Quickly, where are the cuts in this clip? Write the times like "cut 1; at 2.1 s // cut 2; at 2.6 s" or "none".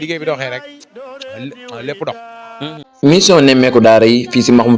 cut 1; at 2.9 s